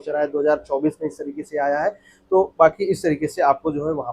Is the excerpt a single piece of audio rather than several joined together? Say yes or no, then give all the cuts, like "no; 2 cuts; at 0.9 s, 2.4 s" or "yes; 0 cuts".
yes; 0 cuts